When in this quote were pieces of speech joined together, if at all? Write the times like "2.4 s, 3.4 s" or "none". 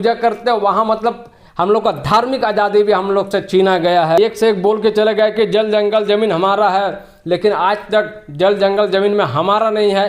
4.2 s